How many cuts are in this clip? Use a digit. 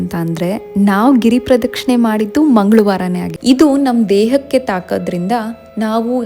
1